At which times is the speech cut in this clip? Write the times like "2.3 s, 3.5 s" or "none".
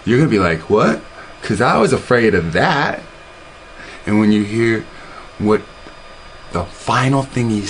none

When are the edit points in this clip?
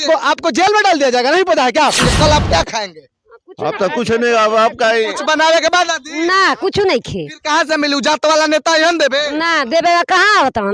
2.0 s

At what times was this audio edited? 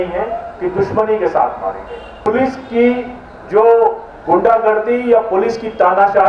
2.2 s

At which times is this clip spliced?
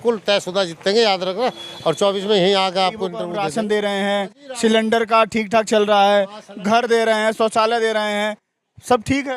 3.2 s

